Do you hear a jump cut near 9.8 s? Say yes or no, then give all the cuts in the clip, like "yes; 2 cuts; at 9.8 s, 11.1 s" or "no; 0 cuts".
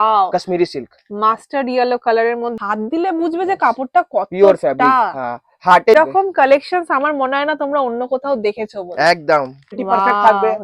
yes; 3 cuts; at 2.5 s, 5.9 s, 9.8 s